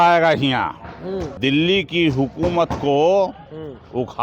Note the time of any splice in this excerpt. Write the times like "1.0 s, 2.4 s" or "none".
1.3 s